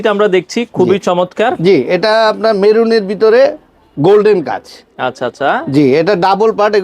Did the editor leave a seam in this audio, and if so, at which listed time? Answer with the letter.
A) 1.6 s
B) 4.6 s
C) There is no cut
A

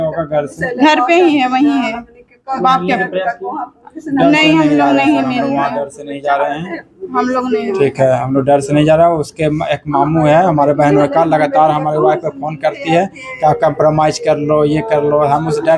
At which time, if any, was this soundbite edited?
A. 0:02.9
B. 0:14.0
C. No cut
C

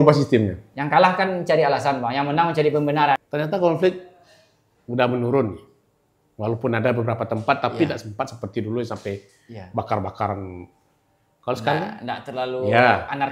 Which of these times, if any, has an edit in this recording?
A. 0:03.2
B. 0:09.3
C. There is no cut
A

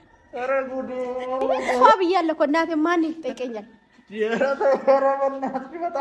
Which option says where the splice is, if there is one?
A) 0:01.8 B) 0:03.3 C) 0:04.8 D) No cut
A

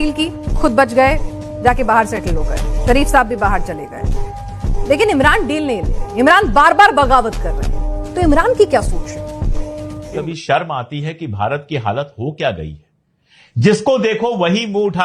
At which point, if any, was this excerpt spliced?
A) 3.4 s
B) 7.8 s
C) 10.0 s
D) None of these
C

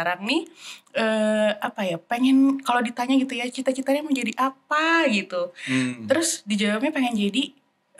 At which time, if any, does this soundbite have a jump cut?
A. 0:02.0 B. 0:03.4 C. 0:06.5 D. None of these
D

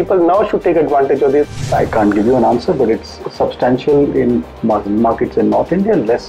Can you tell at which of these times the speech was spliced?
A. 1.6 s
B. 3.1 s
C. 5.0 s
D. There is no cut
A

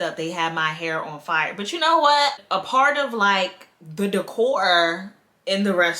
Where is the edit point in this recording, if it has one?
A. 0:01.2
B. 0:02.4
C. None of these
B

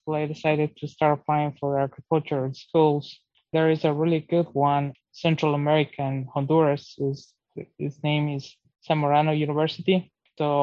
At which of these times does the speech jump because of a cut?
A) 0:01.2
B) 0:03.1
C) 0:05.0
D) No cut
C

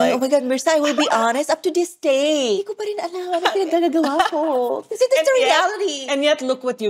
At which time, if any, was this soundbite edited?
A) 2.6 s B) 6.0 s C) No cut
A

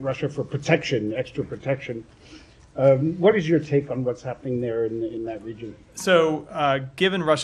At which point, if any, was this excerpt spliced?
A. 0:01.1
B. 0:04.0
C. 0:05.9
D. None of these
B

